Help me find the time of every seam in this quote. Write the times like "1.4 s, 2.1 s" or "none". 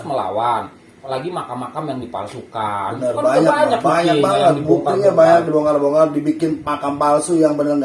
0.9 s